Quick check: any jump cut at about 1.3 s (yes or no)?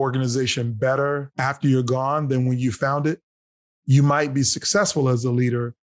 yes